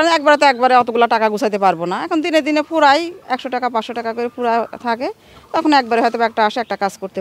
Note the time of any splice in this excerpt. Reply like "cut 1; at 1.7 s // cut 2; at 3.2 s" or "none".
none